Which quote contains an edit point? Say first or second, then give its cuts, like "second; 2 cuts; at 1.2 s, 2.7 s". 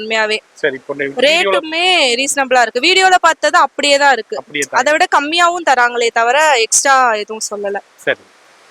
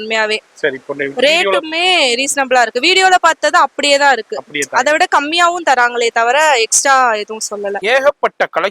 second; 1 cut; at 7.8 s